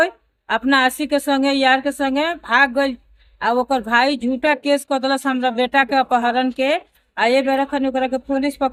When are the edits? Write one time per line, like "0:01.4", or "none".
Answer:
none